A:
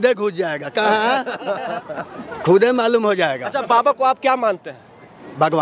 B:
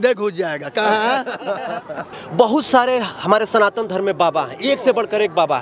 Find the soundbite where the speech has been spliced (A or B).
B